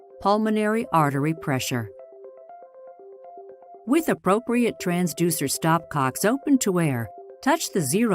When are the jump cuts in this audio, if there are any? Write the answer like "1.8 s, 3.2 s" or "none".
1.9 s, 3.8 s